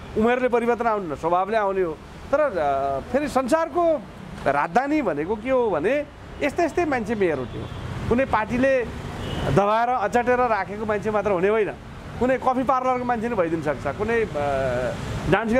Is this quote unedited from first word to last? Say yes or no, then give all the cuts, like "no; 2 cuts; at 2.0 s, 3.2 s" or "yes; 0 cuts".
yes; 0 cuts